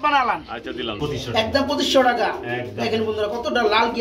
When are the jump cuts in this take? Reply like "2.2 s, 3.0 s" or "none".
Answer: 1.0 s

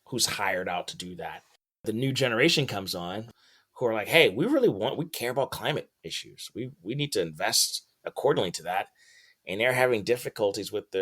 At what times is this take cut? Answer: 1.8 s, 3.2 s

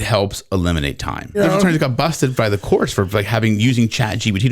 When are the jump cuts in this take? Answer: 1.4 s

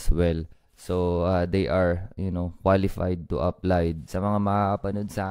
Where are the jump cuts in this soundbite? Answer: 4.0 s

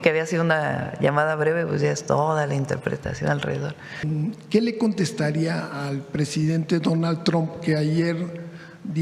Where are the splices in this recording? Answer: 4.0 s

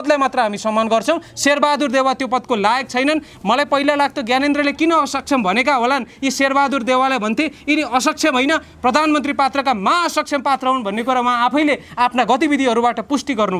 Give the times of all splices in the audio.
none

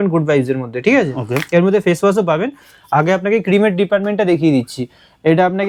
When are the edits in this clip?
none

